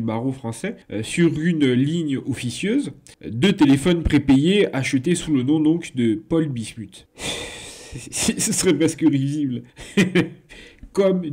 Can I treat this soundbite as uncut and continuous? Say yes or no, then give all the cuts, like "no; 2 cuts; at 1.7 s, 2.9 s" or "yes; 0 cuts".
yes; 0 cuts